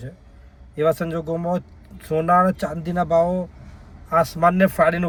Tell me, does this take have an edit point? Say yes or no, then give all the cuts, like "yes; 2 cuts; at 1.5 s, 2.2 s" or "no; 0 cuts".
no; 0 cuts